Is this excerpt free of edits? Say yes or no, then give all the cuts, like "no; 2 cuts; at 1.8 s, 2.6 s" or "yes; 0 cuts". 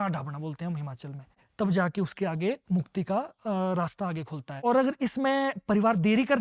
no; 2 cuts; at 1.4 s, 4.6 s